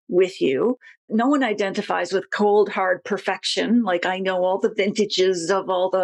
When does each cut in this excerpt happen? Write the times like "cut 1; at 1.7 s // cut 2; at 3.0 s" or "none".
none